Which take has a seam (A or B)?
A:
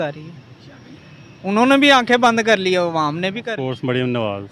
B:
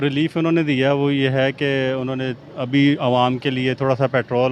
A